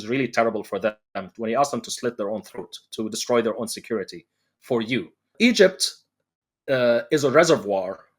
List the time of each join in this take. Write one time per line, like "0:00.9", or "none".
0:05.3